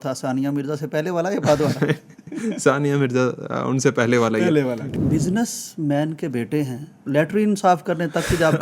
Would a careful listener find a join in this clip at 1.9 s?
no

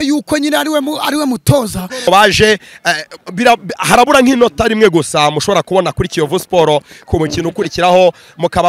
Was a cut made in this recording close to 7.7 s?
no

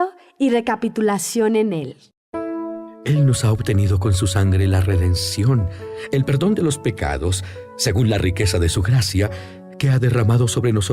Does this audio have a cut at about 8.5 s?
no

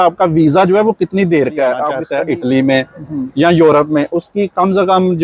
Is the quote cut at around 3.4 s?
no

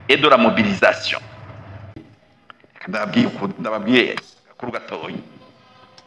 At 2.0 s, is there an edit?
yes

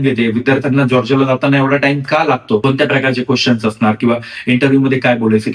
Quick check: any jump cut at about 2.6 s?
yes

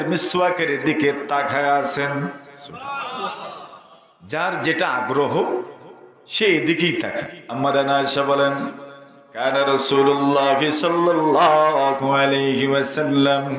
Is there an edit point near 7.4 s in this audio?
yes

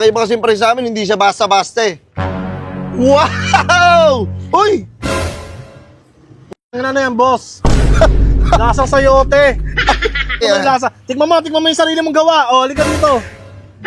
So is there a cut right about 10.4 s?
yes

